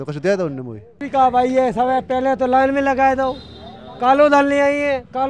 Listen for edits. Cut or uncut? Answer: cut